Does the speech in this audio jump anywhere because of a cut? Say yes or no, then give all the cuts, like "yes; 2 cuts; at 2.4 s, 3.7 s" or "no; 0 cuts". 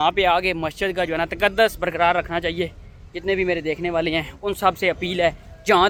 no; 0 cuts